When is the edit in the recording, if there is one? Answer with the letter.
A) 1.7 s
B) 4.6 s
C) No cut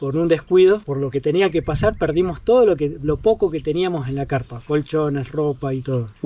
C